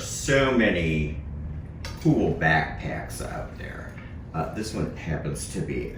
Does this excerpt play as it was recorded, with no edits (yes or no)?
yes